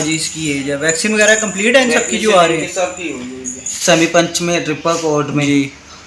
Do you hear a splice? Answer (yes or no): yes